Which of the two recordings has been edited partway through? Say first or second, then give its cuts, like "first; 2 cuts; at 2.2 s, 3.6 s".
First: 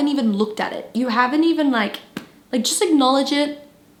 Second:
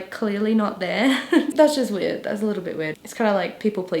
second; 2 cuts; at 1.5 s, 3.0 s